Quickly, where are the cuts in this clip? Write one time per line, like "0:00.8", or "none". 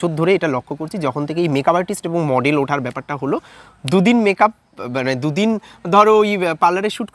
none